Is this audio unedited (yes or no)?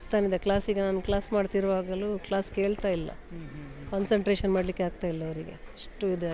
yes